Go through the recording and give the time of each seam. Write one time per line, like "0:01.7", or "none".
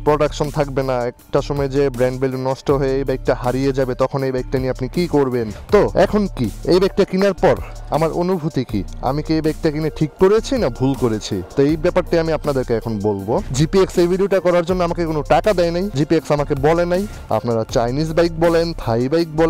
0:05.5
0:13.5
0:17.1